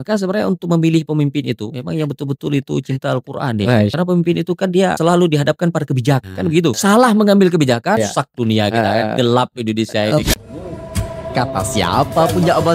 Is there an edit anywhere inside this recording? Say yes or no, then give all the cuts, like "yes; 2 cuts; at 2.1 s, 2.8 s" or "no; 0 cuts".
yes; 6 cuts; at 1.6 s, 3.9 s, 5.0 s, 6.3 s, 8.0 s, 10.2 s